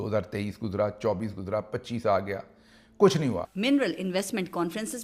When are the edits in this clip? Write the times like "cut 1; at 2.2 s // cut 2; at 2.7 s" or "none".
cut 1; at 3.5 s

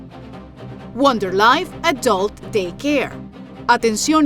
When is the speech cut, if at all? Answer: cut 1; at 0.9 s

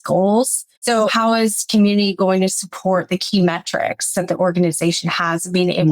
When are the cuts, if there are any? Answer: cut 1; at 1.0 s

